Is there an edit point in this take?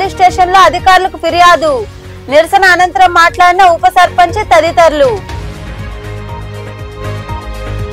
no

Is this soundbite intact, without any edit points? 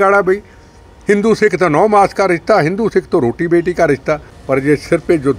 no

